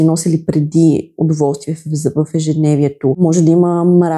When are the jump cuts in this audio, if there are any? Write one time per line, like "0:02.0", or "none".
0:03.2